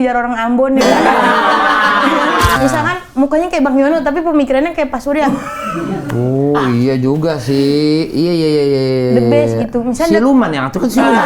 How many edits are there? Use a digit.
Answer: 1